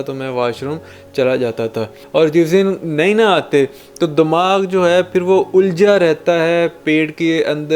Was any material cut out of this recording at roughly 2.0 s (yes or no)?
yes